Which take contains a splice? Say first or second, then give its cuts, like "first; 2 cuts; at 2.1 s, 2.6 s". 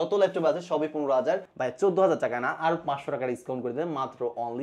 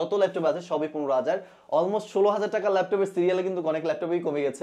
first; 1 cut; at 1.5 s